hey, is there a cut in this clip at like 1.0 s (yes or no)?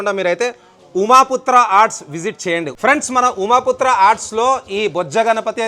no